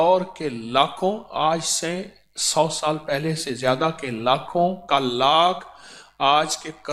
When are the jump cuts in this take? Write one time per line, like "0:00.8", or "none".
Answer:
none